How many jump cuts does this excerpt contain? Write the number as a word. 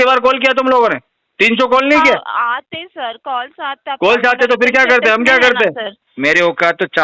one